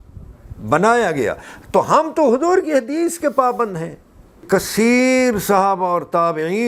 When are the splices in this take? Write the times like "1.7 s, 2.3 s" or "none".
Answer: 4.4 s